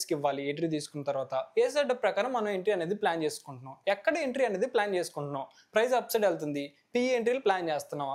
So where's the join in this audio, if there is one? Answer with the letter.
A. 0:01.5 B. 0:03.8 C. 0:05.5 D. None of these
D